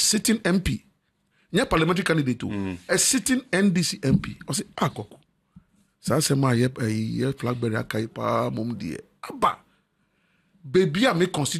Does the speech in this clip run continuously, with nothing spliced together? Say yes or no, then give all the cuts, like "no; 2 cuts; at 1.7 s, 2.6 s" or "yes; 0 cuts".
yes; 0 cuts